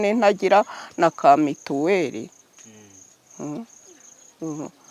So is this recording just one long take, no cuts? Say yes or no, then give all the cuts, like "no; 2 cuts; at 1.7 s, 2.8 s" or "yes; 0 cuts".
yes; 0 cuts